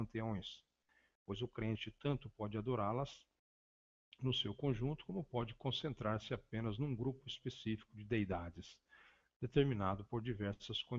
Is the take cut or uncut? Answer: cut